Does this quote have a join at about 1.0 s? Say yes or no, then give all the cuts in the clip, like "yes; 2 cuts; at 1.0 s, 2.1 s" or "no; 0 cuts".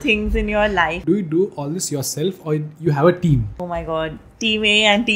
yes; 2 cuts; at 1.0 s, 3.5 s